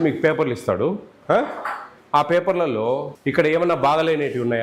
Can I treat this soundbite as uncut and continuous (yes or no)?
no